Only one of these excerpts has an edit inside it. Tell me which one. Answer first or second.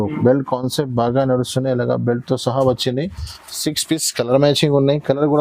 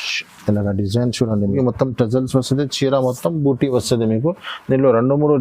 second